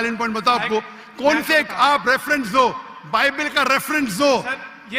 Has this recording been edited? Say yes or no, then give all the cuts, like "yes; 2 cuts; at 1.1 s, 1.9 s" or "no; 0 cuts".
no; 0 cuts